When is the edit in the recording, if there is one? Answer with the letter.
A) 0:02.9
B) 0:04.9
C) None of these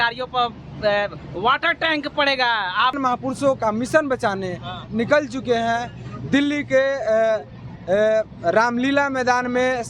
A